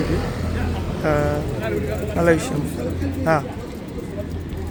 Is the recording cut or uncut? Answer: uncut